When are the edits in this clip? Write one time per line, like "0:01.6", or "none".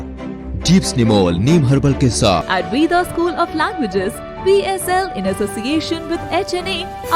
0:02.5